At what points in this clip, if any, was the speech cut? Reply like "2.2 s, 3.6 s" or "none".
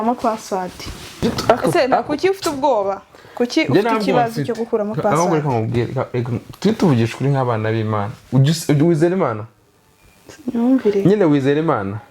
1.2 s